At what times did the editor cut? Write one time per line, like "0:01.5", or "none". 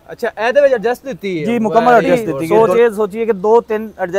0:02.4